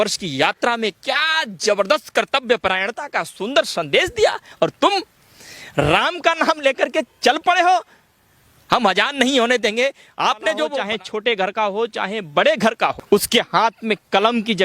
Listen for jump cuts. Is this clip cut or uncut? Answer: cut